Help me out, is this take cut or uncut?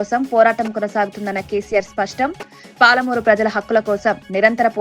uncut